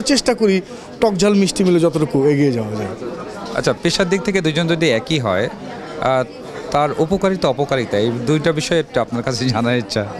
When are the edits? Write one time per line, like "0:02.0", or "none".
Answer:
none